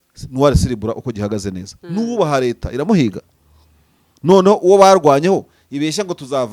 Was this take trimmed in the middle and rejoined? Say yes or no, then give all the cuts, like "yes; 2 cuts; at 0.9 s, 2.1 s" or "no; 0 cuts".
no; 0 cuts